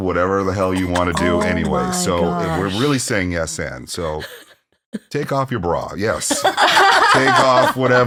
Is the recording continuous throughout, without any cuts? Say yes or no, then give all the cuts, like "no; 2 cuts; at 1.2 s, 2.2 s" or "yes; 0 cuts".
yes; 0 cuts